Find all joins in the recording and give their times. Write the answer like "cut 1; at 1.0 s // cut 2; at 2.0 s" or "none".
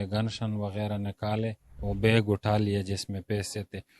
cut 1; at 1.8 s